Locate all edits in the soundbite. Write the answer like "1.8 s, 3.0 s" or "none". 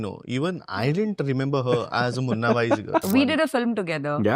3.0 s